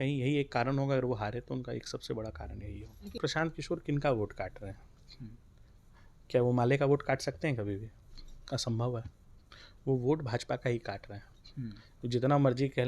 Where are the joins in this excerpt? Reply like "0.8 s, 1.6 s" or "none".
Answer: 3.2 s